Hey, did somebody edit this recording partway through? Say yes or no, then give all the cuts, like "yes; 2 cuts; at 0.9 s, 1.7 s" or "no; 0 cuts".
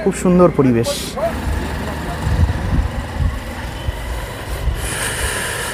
no; 0 cuts